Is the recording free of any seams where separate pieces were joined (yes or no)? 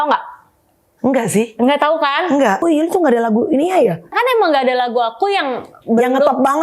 no